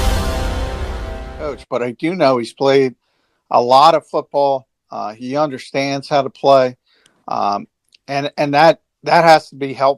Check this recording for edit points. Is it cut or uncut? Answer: cut